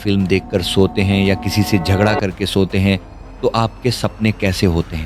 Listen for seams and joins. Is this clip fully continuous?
yes; 0 cuts

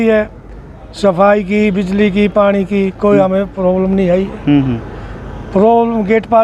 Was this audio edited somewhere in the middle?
no; 0 cuts

